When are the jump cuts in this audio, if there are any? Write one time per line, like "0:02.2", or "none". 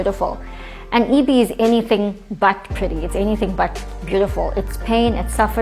none

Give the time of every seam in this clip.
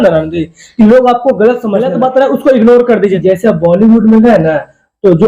0:01.9
0:03.2

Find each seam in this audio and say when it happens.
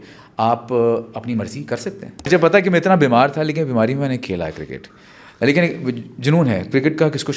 0:02.3

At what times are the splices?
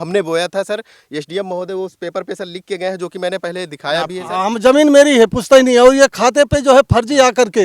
0:04.2

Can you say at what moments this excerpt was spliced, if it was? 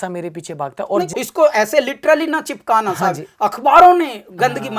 0:01.1

